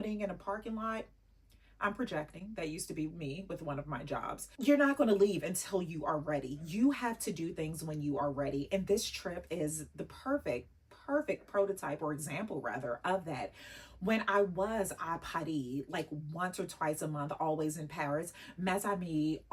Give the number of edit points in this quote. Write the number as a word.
zero